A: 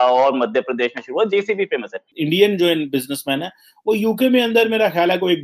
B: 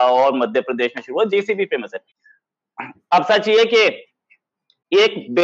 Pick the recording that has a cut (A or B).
A